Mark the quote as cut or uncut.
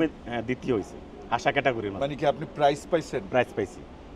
uncut